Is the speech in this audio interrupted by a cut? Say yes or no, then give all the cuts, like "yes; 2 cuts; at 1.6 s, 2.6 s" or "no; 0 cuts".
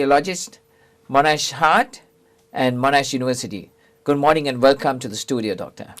yes; 1 cut; at 1.5 s